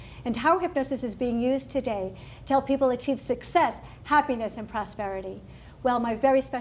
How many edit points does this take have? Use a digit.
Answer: 0